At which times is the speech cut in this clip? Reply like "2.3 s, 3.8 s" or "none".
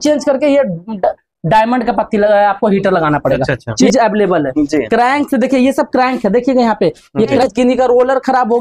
3.8 s, 7.4 s